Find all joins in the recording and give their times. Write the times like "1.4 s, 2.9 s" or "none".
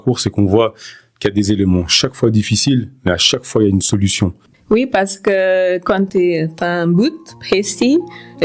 4.5 s